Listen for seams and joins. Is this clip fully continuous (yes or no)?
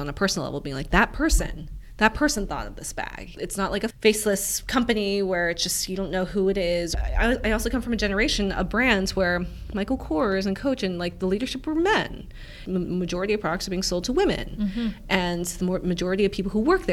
no